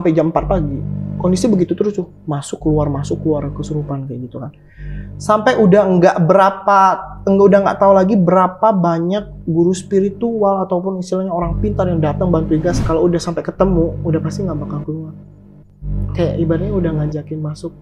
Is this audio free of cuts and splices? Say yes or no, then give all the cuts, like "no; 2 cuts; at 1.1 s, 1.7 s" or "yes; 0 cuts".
no; 1 cut; at 12.8 s